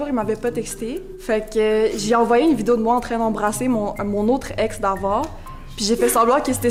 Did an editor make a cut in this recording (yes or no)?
no